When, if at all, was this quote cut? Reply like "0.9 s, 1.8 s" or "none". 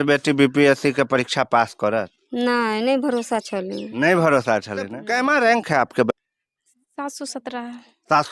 5.0 s, 6.1 s